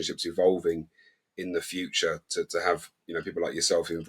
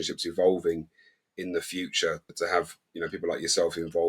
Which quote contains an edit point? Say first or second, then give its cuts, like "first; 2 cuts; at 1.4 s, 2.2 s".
second; 1 cut; at 2.3 s